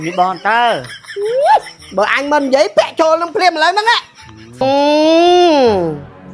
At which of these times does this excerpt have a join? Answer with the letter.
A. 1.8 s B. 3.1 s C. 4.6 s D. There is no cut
C